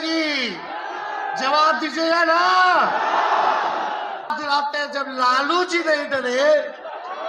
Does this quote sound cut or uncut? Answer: cut